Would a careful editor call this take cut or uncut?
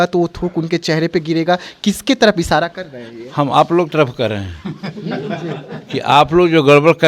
uncut